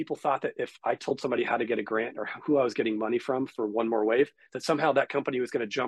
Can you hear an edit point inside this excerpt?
no; 0 cuts

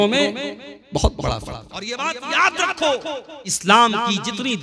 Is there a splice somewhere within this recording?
yes; 2 cuts; at 1.9 s, 3.6 s

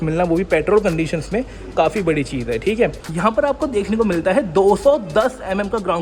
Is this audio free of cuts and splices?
no; 1 cut; at 3.0 s

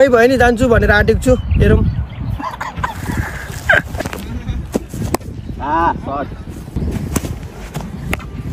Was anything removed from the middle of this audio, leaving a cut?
yes; 2 cuts; at 4.0 s, 6.8 s

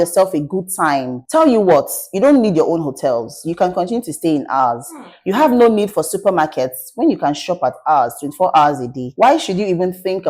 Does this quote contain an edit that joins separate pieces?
yes; 1 cut; at 1.1 s

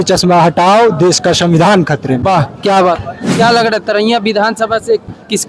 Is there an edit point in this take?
yes; 1 cut; at 3.2 s

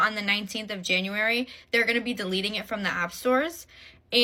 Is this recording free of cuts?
yes; 0 cuts

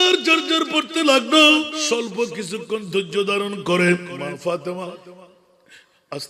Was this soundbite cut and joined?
yes; 2 cuts; at 1.8 s, 4.1 s

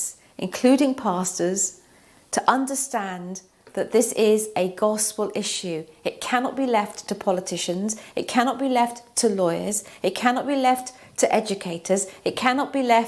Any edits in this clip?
no; 0 cuts

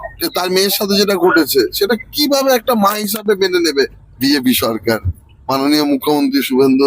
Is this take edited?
yes; 1 cut; at 4.0 s

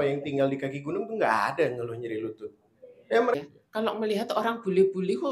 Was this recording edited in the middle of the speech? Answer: yes; 1 cut; at 3.3 s

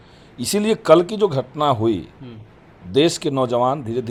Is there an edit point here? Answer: no; 0 cuts

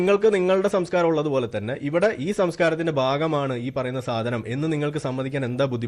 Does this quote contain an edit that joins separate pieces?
no; 0 cuts

